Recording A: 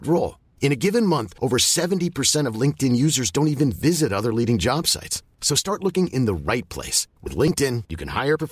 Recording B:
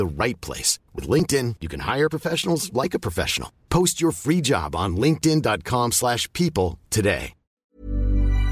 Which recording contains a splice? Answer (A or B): B